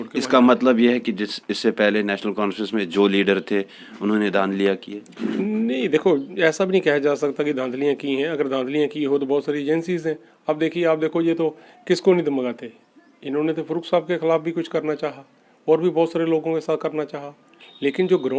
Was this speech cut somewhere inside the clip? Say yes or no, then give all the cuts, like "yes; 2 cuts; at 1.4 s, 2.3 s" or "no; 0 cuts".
no; 0 cuts